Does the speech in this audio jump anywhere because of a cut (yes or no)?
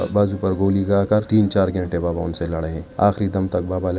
yes